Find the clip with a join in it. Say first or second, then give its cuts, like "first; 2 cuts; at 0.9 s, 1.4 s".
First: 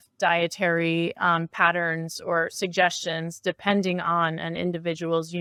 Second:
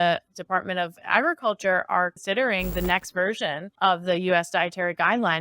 second; 2 cuts; at 2.2 s, 3.7 s